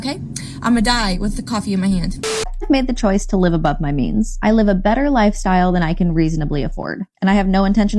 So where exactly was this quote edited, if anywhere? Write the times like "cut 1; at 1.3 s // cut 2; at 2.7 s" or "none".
cut 1; at 2.2 s